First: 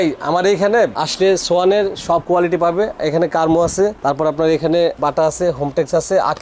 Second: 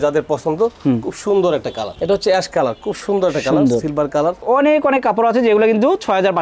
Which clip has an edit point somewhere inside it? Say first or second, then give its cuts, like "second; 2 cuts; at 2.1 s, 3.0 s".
second; 2 cuts; at 1.9 s, 4.4 s